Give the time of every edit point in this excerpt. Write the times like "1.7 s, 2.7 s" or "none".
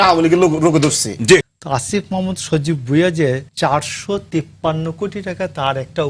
1.5 s, 3.5 s